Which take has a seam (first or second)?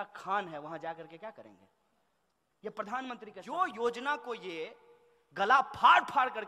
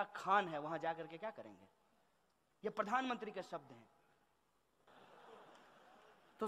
first